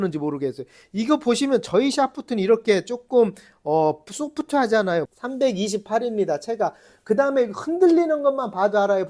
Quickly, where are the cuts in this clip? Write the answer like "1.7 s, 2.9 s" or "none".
5.1 s